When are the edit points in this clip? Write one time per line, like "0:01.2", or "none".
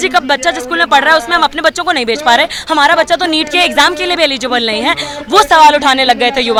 none